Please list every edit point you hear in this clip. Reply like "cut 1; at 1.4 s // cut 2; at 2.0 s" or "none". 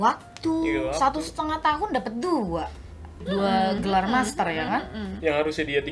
none